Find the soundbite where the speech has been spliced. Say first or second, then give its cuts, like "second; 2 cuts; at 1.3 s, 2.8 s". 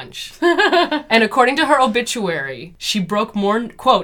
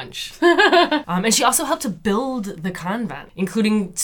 second; 1 cut; at 1.0 s